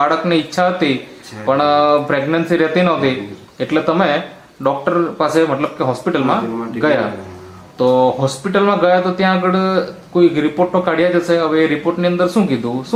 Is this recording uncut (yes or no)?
yes